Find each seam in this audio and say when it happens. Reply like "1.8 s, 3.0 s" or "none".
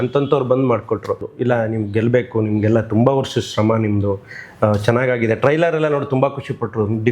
1.3 s